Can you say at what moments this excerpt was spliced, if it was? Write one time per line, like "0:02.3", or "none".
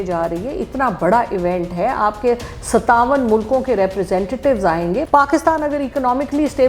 0:05.1